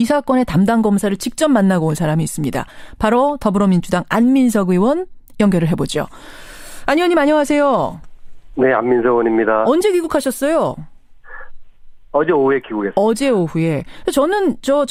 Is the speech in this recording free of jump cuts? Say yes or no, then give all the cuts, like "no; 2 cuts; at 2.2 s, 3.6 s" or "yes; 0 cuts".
yes; 0 cuts